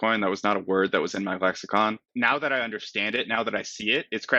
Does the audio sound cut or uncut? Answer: cut